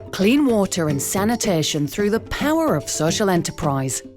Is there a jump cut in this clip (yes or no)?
no